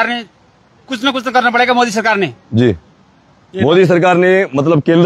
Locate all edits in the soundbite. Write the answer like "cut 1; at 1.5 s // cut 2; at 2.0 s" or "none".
none